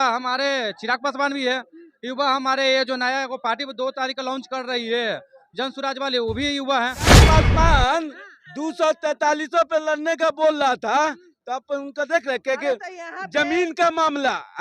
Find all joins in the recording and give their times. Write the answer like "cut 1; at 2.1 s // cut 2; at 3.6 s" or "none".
cut 1; at 7.2 s